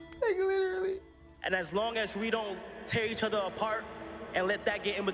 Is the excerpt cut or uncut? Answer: cut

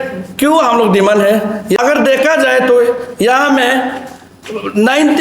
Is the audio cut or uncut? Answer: cut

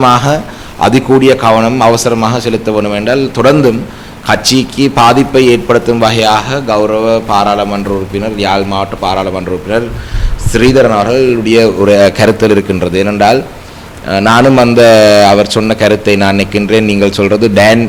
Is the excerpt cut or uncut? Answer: uncut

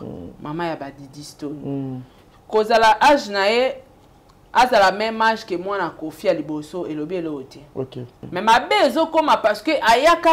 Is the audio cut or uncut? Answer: cut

